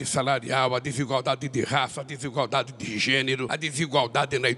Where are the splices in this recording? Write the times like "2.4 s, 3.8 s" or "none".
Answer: 3.5 s